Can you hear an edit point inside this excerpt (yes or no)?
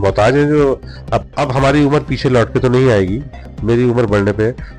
yes